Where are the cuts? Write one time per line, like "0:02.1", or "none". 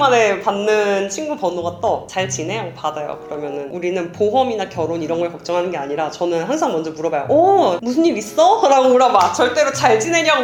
none